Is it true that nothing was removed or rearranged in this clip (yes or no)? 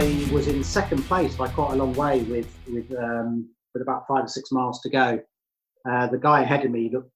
yes